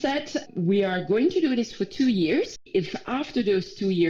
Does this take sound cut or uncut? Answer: cut